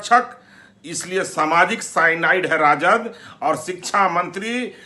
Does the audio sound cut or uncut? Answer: uncut